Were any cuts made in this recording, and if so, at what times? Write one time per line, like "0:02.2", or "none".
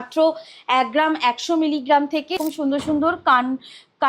0:02.4